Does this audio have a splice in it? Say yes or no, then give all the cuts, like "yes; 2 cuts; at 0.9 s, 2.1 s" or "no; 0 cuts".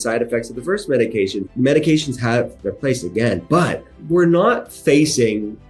yes; 2 cuts; at 1.4 s, 3.9 s